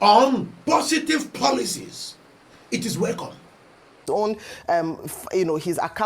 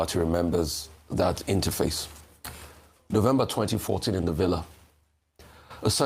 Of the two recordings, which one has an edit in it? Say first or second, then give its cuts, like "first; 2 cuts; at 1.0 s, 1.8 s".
first; 1 cut; at 4.0 s